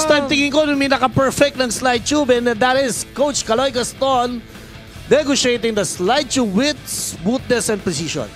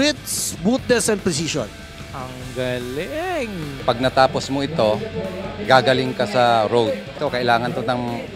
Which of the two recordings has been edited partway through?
second; 2 cuts; at 3.7 s, 7.1 s

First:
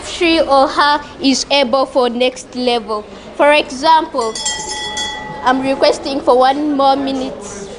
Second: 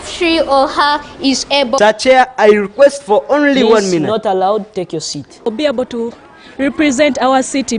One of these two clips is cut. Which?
second; 2 cuts; at 1.8 s, 5.5 s

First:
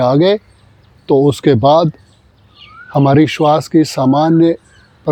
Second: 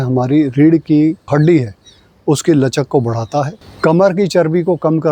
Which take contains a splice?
second; 1 cut; at 1.3 s

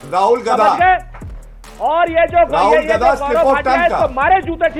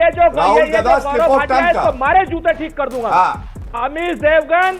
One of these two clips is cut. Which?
second; 1 cut; at 3.8 s

